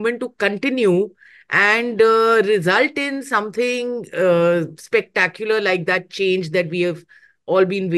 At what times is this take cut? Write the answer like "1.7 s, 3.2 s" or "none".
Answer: none